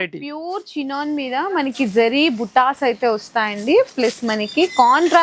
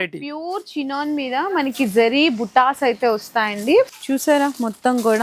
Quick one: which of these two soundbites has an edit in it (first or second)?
second